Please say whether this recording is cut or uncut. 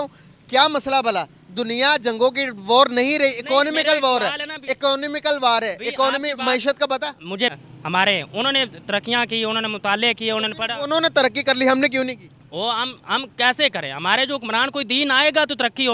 cut